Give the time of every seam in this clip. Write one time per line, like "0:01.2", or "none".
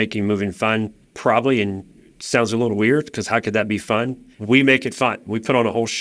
0:04.3